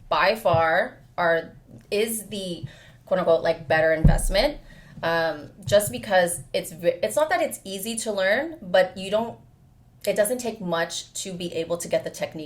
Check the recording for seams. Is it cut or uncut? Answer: uncut